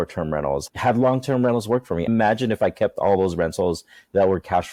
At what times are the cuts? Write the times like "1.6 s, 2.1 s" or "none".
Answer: none